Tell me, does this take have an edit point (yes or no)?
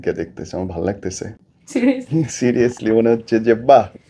no